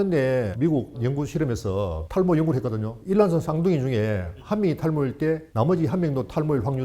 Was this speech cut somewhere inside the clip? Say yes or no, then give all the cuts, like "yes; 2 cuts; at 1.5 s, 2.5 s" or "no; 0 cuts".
yes; 1 cut; at 5.5 s